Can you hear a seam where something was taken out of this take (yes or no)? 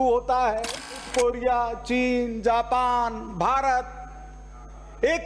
no